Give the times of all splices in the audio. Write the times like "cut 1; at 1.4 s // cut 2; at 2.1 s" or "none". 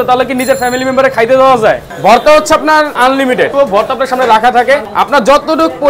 cut 1; at 1.9 s // cut 2; at 3.5 s // cut 3; at 4.9 s